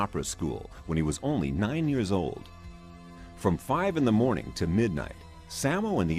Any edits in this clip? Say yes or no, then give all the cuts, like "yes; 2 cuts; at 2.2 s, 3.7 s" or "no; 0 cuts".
no; 0 cuts